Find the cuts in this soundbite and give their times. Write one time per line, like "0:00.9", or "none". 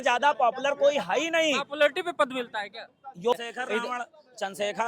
0:03.3